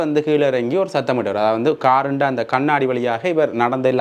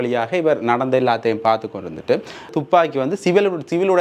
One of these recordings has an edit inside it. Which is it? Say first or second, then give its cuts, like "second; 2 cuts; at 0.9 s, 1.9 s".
second; 1 cut; at 2.5 s